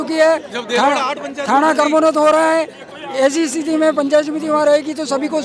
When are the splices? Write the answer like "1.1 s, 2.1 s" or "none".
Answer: none